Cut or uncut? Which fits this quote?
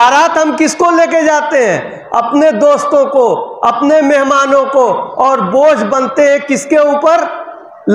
uncut